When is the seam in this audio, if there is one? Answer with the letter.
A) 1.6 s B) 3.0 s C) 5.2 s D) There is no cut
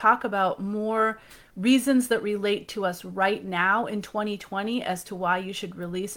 D